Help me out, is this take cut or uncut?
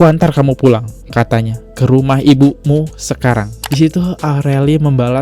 cut